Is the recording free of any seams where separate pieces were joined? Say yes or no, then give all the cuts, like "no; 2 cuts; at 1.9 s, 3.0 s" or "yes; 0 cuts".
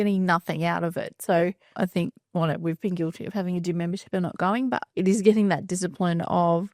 yes; 0 cuts